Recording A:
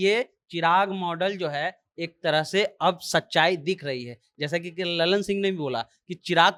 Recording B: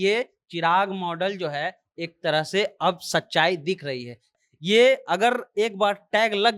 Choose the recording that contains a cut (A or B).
B